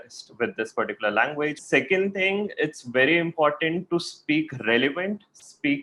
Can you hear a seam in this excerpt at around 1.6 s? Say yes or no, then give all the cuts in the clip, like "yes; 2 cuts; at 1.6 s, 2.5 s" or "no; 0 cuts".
yes; 1 cut; at 1.6 s